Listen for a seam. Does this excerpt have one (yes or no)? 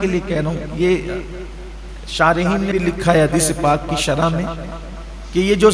yes